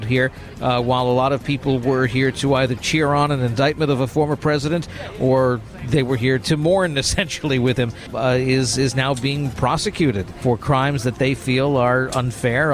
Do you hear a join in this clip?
yes; 3 cuts; at 6.4 s, 8.0 s, 10.4 s

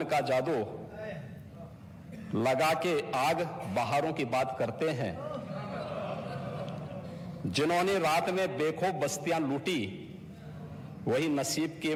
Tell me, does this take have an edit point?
no; 0 cuts

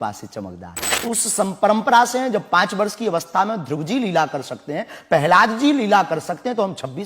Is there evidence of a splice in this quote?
yes; 1 cut; at 1.0 s

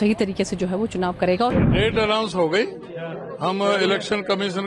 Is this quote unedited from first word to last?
no; 1 cut; at 1.6 s

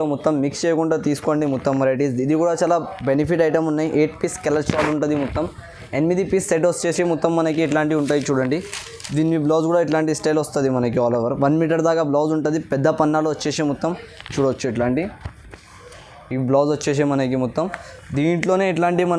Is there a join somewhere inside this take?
no; 0 cuts

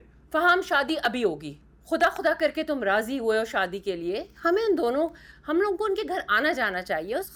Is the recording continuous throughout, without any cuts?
yes; 0 cuts

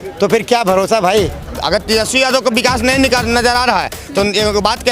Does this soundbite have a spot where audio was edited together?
yes; 1 cut; at 1.5 s

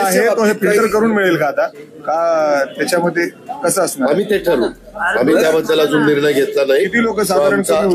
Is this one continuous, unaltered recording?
yes; 0 cuts

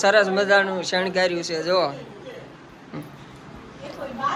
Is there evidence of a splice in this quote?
no; 0 cuts

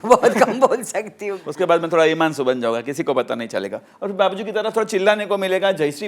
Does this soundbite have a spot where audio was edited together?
yes; 1 cut; at 1.4 s

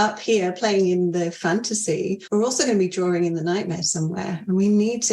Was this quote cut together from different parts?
yes; 1 cut; at 2.2 s

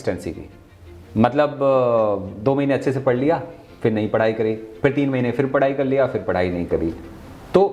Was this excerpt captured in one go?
yes; 0 cuts

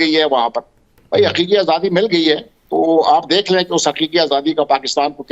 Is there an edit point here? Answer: no; 0 cuts

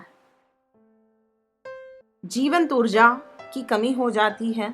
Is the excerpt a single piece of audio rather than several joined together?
no; 1 cut; at 2.0 s

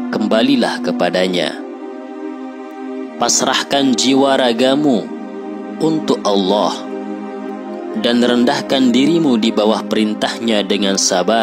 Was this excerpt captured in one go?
yes; 0 cuts

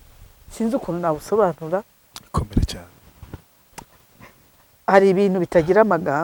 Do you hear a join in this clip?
no; 0 cuts

